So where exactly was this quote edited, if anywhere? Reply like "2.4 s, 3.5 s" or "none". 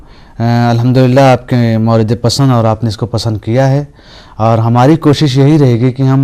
2.3 s